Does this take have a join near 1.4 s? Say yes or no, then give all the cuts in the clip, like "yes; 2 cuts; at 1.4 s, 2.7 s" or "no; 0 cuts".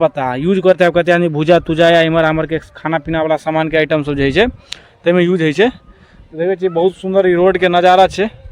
no; 0 cuts